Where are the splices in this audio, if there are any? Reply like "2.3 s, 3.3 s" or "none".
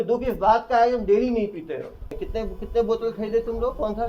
2.2 s